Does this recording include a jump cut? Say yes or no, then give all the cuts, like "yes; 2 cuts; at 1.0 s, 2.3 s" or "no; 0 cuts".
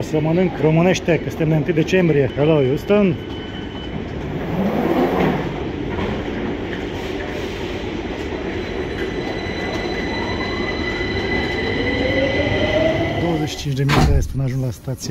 no; 0 cuts